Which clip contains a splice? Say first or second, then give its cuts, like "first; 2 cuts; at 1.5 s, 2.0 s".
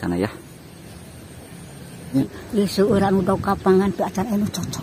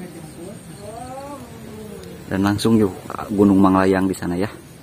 first; 1 cut; at 2.1 s